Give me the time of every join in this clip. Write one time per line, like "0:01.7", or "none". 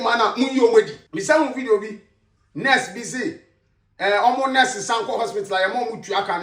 0:01.0